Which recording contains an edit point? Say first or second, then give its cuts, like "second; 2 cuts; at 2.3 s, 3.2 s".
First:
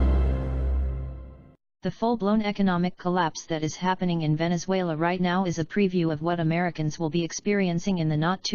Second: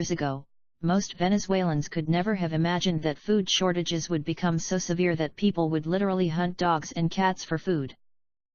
first; 1 cut; at 4.8 s